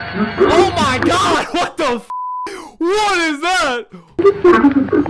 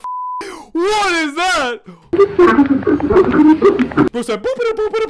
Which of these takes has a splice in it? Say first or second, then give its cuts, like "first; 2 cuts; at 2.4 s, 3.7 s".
second; 1 cut; at 4.1 s